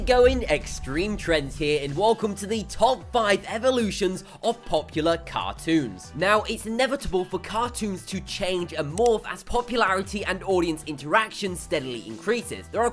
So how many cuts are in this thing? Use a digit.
0